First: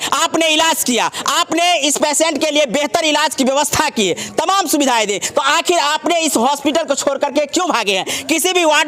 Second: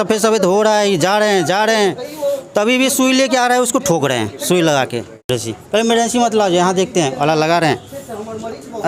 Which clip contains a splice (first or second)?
second